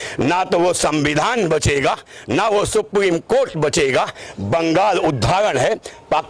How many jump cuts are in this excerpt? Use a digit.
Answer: 0